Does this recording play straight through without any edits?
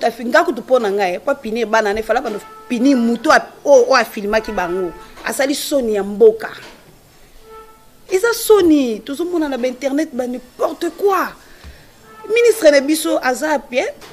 yes; 0 cuts

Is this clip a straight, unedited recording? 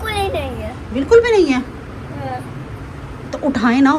yes; 0 cuts

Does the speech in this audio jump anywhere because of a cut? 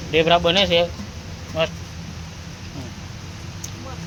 no; 0 cuts

